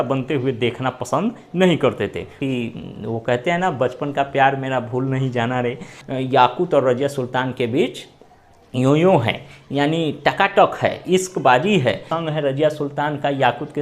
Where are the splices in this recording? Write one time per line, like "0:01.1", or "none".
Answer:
0:02.4
0:05.9
0:12.1